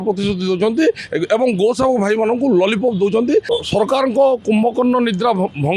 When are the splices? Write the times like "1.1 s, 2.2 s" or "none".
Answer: 3.5 s